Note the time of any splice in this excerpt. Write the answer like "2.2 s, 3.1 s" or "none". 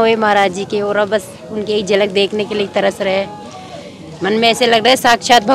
none